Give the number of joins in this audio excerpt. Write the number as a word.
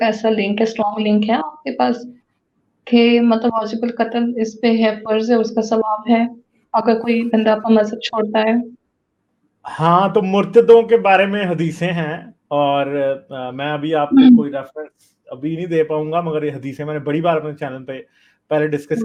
zero